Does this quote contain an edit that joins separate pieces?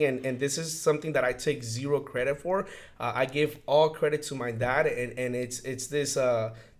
no; 0 cuts

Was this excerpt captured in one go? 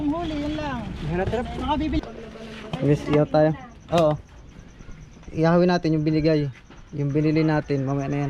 no; 1 cut; at 2.0 s

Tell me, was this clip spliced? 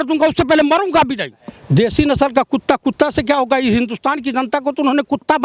yes; 1 cut; at 1.5 s

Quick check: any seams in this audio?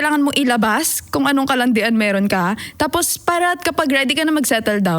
no; 0 cuts

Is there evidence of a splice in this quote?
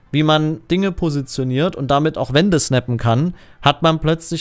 no; 0 cuts

